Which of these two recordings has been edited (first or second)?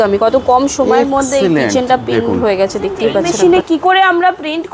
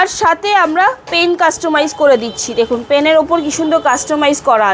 first